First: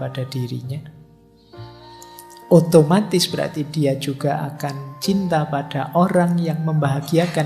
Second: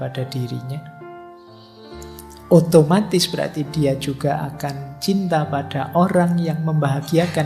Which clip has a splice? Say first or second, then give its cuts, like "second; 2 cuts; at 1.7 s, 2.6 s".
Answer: second; 2 cuts; at 0.9 s, 2.5 s